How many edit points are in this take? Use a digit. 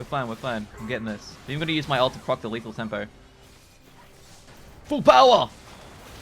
2